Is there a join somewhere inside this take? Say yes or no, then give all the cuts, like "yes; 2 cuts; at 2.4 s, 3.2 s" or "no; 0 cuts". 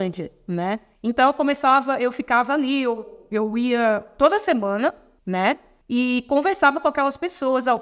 no; 0 cuts